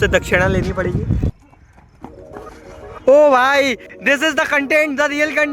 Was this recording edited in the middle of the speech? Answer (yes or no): yes